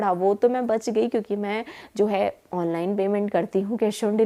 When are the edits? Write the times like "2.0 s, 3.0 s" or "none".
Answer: none